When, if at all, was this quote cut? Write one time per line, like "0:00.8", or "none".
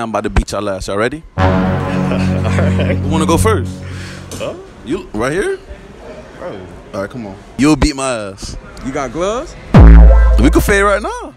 0:07.5